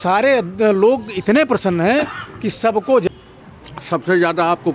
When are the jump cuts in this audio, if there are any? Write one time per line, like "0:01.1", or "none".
0:03.0